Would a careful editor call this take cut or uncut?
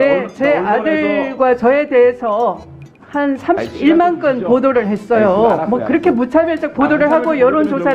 uncut